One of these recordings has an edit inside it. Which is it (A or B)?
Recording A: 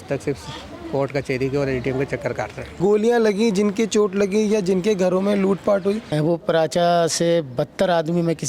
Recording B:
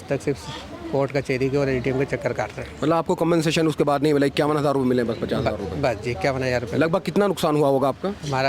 A